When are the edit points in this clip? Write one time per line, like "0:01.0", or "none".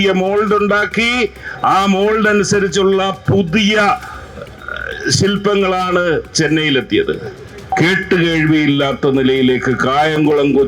0:07.6